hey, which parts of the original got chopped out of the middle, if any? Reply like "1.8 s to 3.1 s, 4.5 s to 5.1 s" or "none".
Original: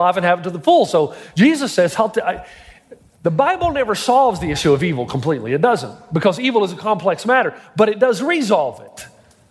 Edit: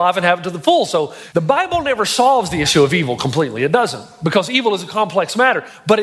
1.2 s to 3.1 s